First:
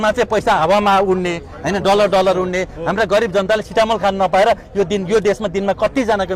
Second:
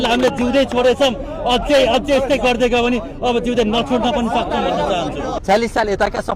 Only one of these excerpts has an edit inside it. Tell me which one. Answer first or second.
second